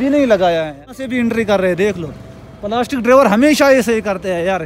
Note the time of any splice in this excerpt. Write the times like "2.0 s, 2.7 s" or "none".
1.0 s